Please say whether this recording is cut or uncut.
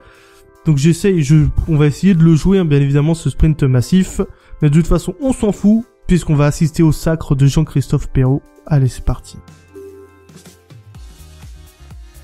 uncut